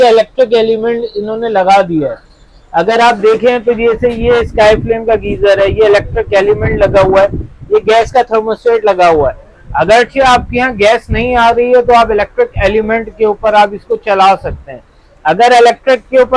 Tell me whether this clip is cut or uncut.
uncut